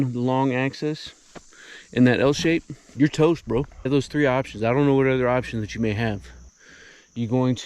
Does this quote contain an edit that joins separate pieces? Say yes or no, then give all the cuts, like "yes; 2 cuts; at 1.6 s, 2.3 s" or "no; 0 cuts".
yes; 2 cuts; at 2.8 s, 3.9 s